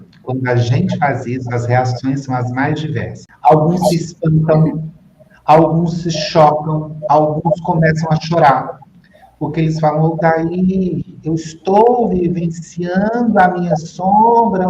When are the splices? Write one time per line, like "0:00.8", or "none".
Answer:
0:03.2

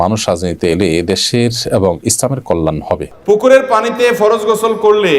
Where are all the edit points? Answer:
0:03.1

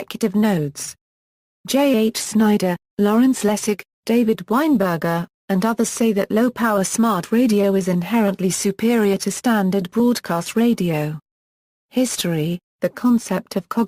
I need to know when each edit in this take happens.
none

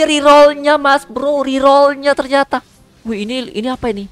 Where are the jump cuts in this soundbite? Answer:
none

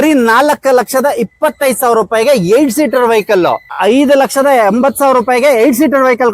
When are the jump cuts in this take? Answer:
0:03.8

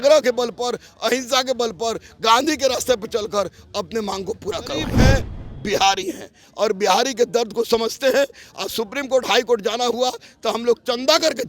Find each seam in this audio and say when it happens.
0:05.0

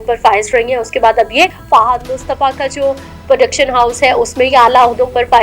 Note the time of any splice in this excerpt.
0:01.6

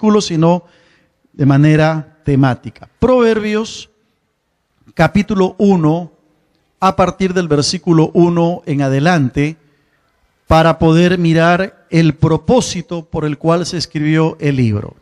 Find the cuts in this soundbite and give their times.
0:14.1

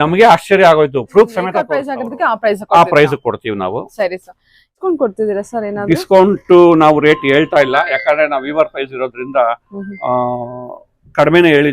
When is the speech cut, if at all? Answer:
0:01.9
0:04.7

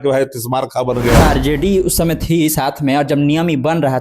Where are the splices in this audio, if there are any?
0:01.2

